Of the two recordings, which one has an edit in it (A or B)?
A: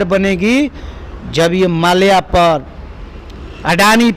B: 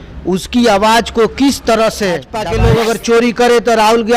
B